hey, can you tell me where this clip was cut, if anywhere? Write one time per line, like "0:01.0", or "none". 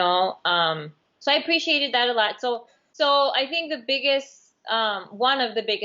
0:02.8